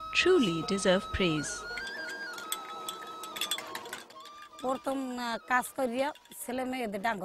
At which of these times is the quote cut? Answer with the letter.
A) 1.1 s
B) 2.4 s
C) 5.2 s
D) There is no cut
A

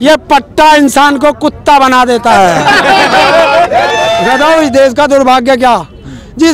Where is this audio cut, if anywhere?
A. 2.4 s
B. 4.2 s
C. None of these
B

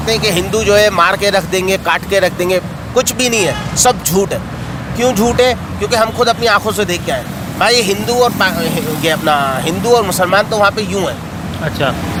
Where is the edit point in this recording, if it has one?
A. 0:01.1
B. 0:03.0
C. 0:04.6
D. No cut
D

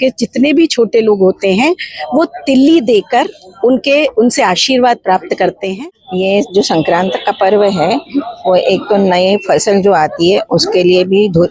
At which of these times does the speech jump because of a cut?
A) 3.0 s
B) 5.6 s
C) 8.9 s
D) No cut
B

